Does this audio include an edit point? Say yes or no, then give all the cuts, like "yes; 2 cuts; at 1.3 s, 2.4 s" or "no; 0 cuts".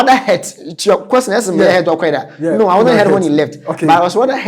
no; 0 cuts